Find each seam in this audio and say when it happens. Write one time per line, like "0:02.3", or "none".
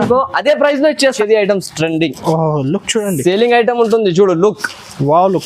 0:01.1